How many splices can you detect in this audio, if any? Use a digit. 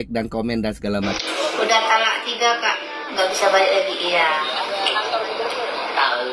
1